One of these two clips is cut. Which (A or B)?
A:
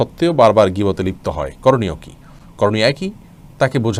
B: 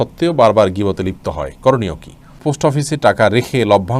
B